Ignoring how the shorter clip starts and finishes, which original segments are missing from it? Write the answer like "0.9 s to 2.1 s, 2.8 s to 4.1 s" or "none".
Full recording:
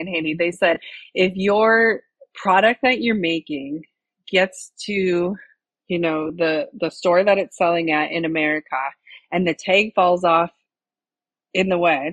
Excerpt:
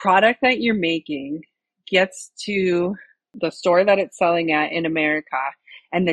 5.7 s to 6.7 s